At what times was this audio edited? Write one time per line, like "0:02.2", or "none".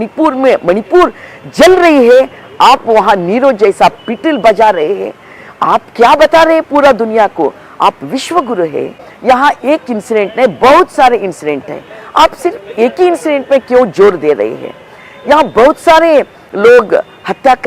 0:09.0